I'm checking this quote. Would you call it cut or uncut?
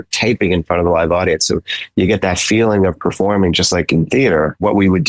uncut